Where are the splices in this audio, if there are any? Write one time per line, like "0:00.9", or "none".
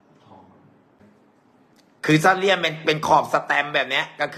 0:01.0